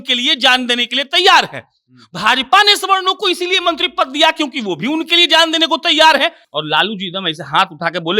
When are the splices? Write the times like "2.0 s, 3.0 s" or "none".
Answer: 6.4 s